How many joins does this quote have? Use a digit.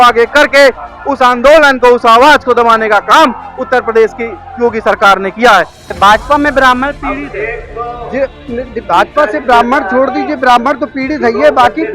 1